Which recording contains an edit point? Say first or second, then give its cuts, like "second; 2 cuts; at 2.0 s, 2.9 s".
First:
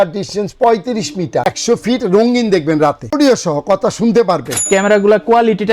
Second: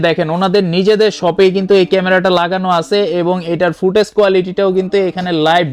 first; 3 cuts; at 1.4 s, 3.0 s, 4.7 s